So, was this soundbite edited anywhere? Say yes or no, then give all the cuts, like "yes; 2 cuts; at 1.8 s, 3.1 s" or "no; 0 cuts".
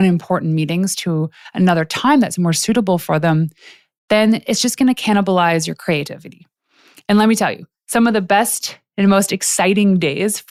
no; 0 cuts